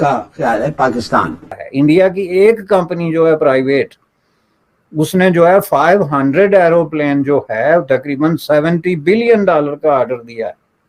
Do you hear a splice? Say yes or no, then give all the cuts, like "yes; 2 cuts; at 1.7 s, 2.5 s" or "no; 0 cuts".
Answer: yes; 1 cut; at 1.6 s